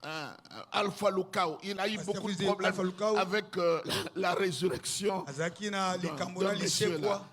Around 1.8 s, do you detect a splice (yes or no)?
yes